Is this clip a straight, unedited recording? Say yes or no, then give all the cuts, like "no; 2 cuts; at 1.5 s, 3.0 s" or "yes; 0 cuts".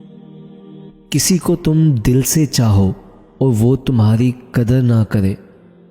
no; 1 cut; at 0.9 s